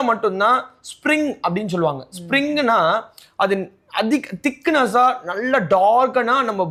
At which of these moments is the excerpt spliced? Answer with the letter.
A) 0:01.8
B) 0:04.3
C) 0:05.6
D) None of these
D